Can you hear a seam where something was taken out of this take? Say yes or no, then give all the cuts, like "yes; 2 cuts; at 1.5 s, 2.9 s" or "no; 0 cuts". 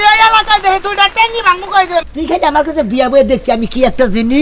yes; 1 cut; at 2.1 s